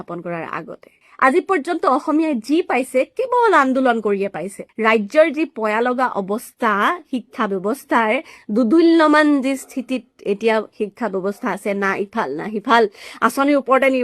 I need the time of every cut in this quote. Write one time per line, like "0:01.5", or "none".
0:01.0
0:04.7